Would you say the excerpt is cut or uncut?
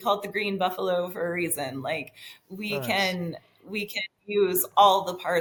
uncut